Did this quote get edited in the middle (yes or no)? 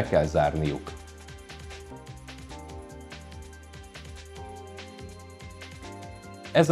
yes